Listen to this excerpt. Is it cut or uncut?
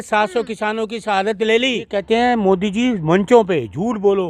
cut